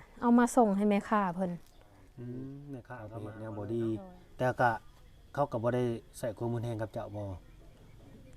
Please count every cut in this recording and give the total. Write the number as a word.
one